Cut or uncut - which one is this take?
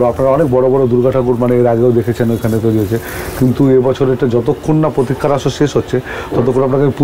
uncut